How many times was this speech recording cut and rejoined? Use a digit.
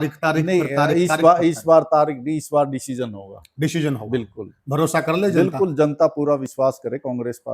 0